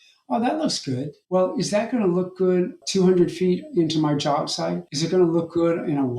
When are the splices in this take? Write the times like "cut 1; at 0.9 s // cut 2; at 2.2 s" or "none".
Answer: cut 1; at 2.8 s // cut 2; at 4.9 s